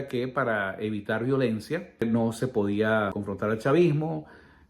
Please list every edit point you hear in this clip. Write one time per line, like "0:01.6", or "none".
0:02.0
0:03.2